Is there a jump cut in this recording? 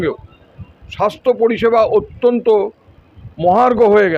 no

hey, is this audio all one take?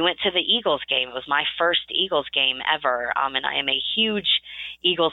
yes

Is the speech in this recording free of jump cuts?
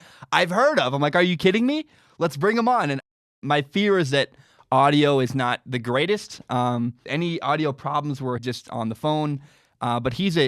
no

